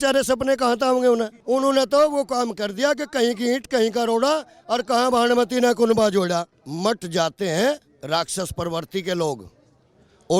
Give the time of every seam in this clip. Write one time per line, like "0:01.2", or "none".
0:01.4
0:06.6

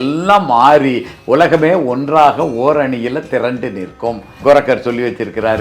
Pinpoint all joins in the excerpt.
0:04.3

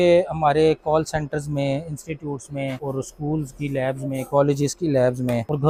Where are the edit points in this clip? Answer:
none

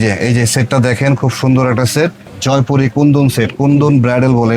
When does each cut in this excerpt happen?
0:02.2

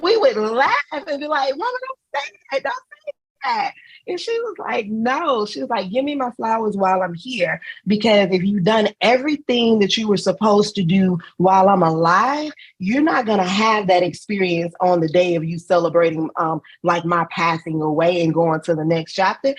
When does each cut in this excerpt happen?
none

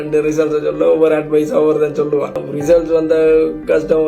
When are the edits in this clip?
0:02.5

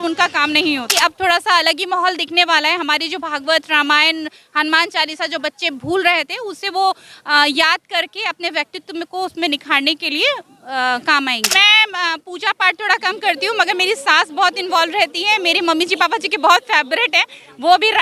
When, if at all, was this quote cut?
0:00.9
0:11.5

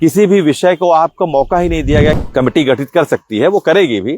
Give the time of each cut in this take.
0:02.2

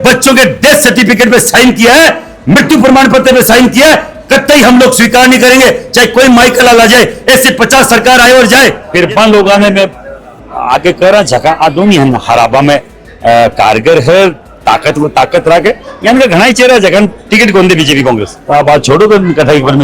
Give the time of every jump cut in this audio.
0:08.8
0:18.3

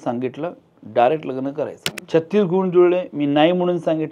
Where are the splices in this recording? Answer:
0:01.8

